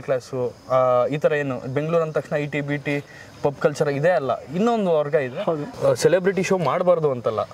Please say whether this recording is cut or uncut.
cut